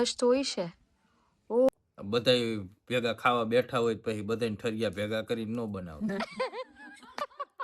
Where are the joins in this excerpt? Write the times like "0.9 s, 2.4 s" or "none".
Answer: 1.7 s